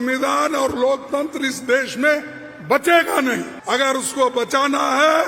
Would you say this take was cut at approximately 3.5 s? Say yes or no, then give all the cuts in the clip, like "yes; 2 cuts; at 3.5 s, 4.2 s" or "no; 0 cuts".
yes; 1 cut; at 3.5 s